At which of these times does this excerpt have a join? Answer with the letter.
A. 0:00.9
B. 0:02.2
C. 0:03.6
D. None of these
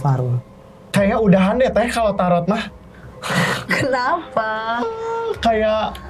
A